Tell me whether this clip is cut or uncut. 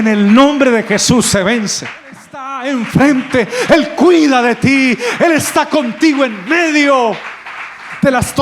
cut